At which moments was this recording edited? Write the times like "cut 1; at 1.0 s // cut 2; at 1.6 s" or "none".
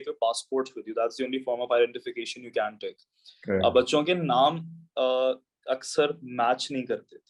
none